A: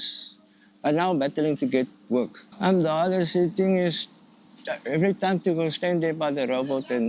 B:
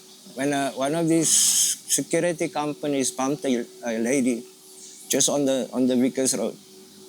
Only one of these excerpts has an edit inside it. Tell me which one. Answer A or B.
A